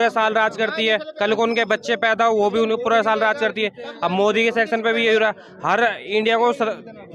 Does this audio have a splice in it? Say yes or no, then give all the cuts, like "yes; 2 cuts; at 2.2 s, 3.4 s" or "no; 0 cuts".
no; 0 cuts